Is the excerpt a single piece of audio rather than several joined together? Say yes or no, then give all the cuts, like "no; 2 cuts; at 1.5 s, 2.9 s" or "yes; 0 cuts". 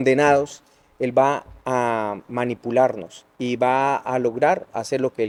yes; 0 cuts